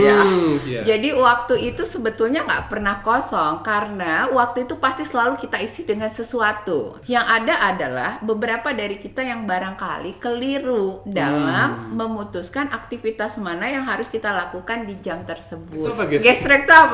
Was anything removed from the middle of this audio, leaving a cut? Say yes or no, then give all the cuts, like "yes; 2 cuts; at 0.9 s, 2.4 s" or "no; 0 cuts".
yes; 2 cuts; at 7.0 s, 16.0 s